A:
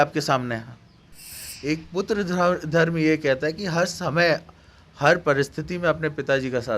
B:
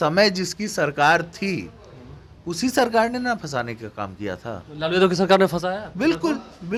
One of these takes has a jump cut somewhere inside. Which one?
A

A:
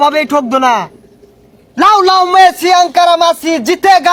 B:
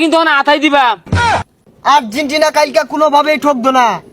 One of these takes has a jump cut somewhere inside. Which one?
B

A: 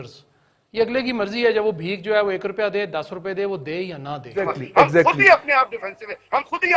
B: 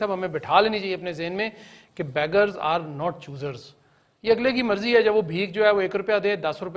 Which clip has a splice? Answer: A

